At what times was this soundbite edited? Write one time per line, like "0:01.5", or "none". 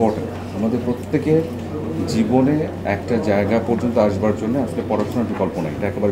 none